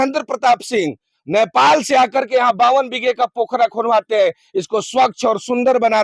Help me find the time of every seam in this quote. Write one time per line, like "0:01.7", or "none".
none